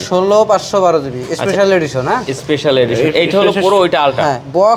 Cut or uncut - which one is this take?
uncut